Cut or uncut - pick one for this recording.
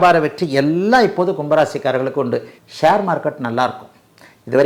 cut